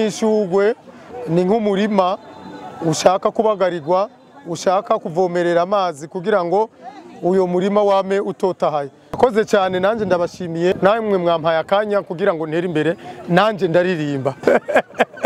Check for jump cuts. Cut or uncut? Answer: cut